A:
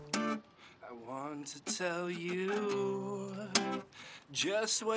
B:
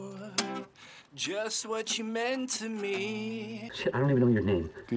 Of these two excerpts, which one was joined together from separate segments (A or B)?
B